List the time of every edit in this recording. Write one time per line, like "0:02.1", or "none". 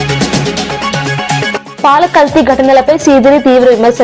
none